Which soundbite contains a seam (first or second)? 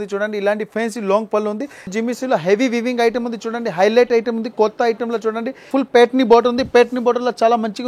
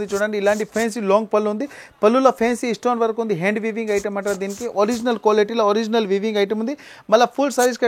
first